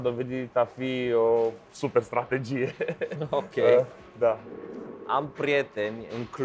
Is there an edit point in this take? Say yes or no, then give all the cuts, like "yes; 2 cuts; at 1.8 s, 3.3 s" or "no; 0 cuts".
no; 0 cuts